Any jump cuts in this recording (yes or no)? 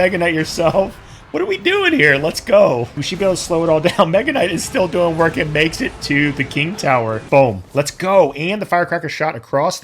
yes